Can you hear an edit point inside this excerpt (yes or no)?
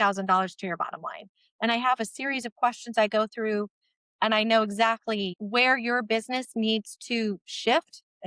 yes